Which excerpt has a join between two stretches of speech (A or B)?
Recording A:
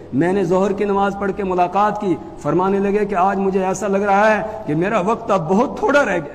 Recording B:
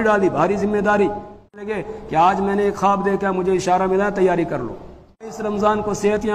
B